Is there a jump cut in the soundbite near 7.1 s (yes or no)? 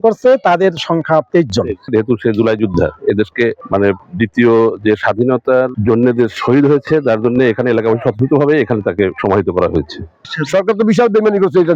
no